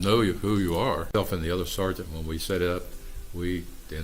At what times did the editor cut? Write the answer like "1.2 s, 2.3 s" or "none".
1.1 s